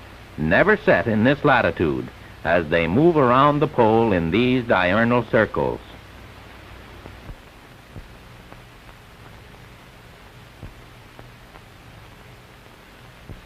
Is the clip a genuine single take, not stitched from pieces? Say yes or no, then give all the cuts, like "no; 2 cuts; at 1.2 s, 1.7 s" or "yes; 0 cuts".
yes; 0 cuts